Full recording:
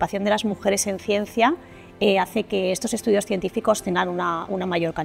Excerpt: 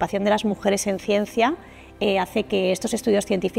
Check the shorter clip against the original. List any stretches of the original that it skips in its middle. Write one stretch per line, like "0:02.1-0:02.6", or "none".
none